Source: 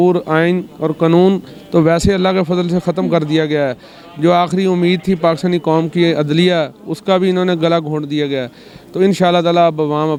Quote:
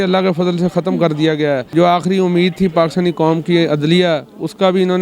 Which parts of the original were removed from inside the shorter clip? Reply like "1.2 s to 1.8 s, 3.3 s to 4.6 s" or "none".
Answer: 3.8 s to 4.1 s